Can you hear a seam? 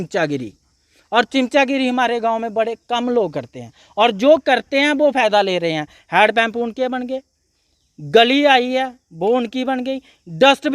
no; 0 cuts

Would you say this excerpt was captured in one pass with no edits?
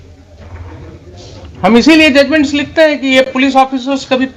yes; 0 cuts

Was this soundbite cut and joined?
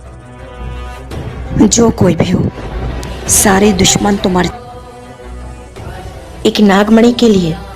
yes; 1 cut; at 4.5 s

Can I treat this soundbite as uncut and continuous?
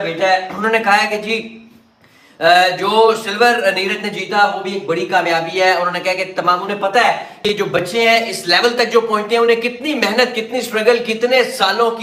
yes; 0 cuts

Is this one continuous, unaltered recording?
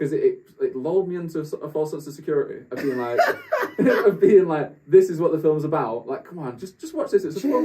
yes; 0 cuts

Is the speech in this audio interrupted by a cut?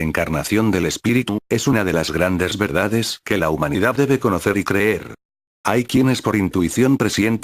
yes; 1 cut; at 5.7 s

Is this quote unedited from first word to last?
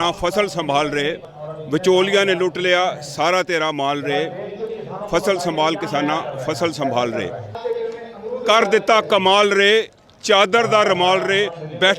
no; 2 cuts; at 1.3 s, 7.5 s

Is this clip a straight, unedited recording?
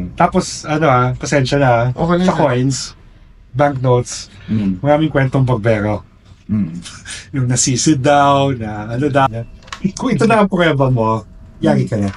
no; 1 cut; at 9.3 s

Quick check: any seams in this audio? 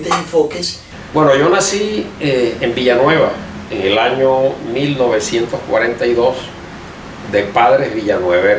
yes; 1 cut; at 1.0 s

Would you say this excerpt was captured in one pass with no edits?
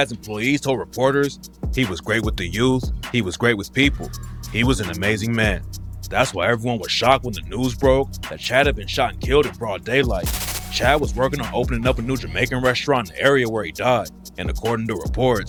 yes; 0 cuts

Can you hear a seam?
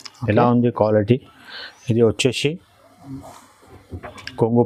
no; 0 cuts

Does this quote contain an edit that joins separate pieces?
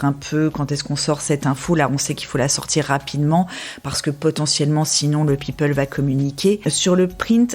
yes; 1 cut; at 6.6 s

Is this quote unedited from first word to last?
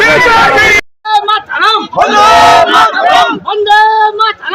no; 1 cut; at 1.1 s

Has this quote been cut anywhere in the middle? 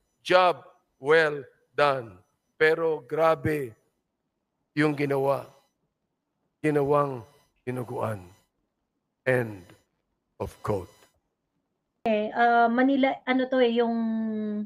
yes; 1 cut; at 12.1 s

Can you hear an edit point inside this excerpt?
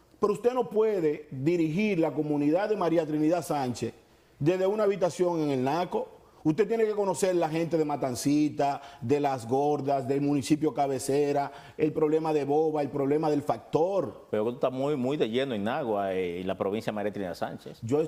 no; 0 cuts

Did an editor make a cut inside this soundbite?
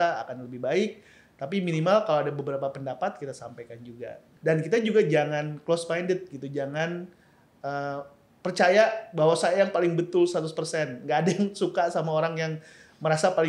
yes; 1 cut; at 4.2 s

